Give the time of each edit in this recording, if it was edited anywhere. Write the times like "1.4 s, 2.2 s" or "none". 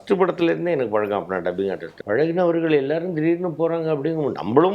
1.9 s

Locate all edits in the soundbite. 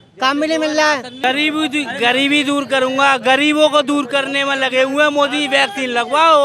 1.2 s

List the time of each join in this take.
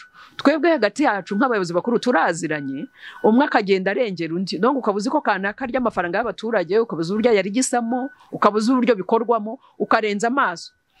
none

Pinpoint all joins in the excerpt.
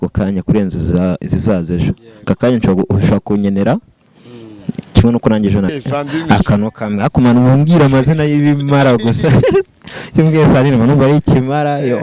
5.7 s

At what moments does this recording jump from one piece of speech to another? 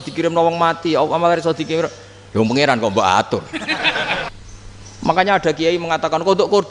4.3 s

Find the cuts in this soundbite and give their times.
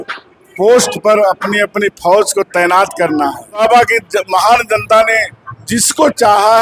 3.6 s

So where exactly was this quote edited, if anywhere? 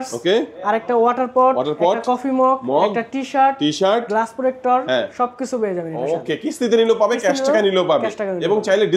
none

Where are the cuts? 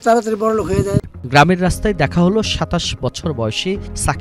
none

